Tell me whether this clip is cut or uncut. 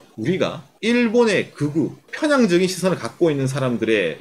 cut